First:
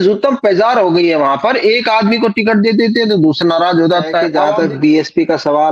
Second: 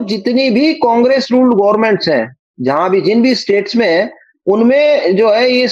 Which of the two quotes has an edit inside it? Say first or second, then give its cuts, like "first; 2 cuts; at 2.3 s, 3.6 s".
first; 1 cut; at 4.4 s